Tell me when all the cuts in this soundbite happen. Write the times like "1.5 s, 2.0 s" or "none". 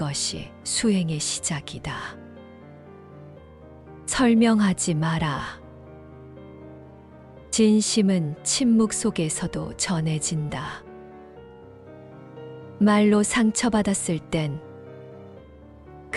2.1 s, 4.0 s, 5.5 s, 7.0 s